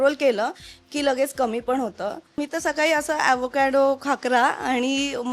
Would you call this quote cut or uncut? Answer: cut